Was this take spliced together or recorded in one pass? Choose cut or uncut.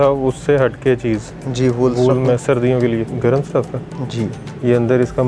cut